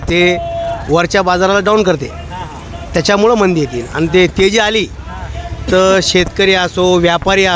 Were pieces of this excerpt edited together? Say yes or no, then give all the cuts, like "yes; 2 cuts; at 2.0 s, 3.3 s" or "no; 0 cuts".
no; 0 cuts